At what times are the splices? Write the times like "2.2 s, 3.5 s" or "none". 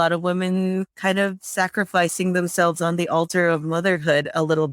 none